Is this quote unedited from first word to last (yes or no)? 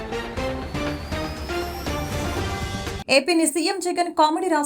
no